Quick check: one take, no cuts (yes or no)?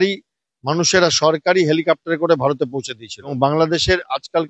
no